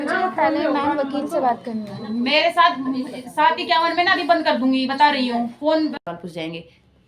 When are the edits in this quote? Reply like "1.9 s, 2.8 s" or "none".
6.0 s